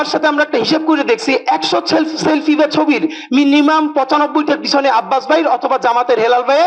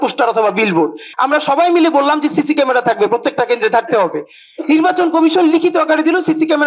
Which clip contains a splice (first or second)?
second